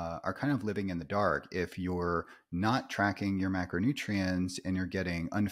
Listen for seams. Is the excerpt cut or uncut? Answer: uncut